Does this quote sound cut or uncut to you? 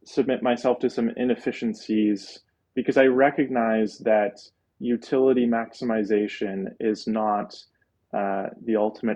uncut